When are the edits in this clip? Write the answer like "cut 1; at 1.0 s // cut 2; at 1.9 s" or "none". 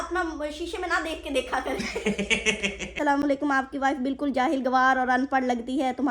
cut 1; at 3.0 s